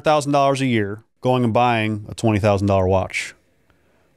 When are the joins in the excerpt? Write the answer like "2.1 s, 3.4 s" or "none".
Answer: 1.0 s